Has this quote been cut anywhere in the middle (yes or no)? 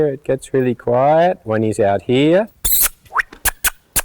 yes